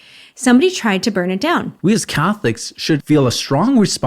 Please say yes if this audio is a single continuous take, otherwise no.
no